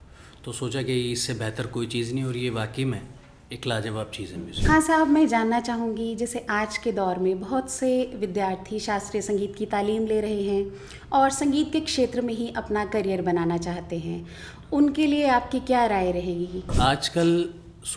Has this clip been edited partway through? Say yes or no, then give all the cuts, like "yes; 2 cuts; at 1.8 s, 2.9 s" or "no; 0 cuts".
yes; 2 cuts; at 4.5 s, 16.7 s